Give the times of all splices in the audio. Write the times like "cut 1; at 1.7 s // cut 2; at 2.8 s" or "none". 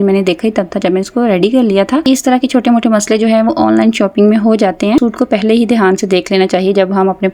cut 1; at 2.0 s // cut 2; at 5.0 s